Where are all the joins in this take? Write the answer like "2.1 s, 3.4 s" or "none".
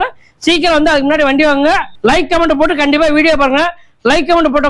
1.9 s